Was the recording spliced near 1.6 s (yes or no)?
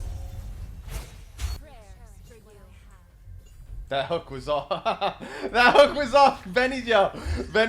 yes